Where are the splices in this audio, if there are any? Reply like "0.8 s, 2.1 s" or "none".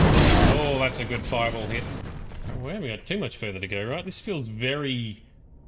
2.0 s